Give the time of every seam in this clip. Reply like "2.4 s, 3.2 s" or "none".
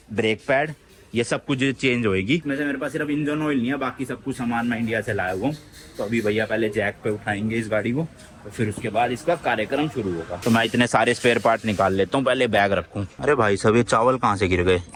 none